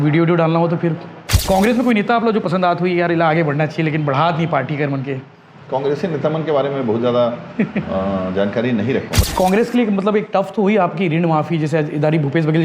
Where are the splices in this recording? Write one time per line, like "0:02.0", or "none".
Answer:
0:01.3
0:09.2